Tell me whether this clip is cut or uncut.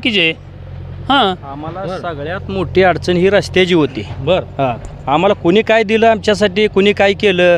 uncut